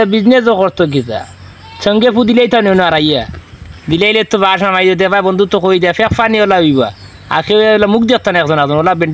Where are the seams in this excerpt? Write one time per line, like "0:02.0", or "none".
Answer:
none